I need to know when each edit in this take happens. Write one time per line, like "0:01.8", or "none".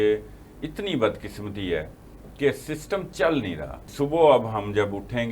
0:03.8